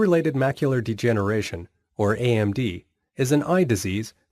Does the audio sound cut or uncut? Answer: uncut